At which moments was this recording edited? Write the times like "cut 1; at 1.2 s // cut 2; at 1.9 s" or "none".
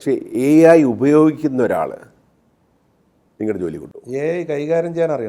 none

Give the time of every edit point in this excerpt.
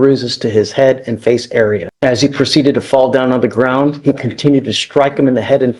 cut 1; at 1.9 s

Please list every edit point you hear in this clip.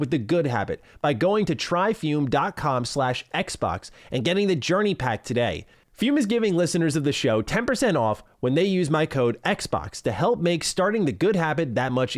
none

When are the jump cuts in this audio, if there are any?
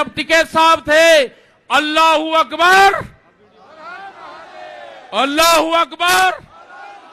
none

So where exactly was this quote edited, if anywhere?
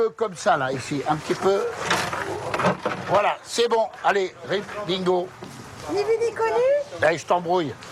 none

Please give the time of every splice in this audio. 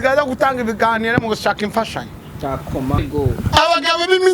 cut 1; at 3.0 s

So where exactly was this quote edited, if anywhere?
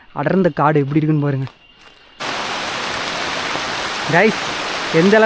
cut 1; at 2.2 s

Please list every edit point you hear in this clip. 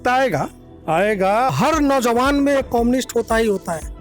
cut 1; at 1.5 s

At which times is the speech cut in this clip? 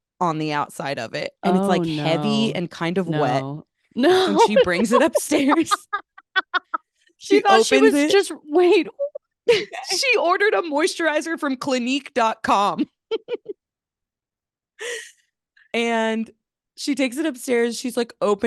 none

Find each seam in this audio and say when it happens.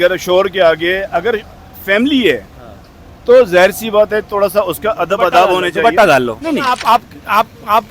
cut 1; at 6.7 s

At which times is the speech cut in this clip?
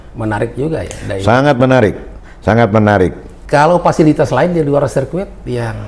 cut 1; at 3.3 s

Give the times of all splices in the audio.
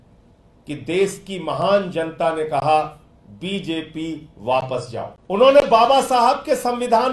cut 1; at 5.2 s

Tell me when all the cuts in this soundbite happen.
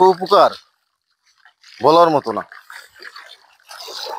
none

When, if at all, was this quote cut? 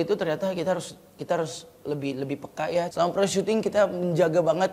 cut 1; at 2.9 s

